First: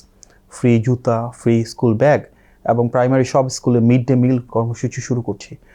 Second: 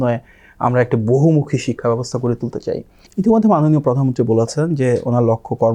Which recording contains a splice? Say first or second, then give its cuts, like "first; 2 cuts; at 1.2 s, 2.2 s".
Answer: second; 1 cut; at 3.0 s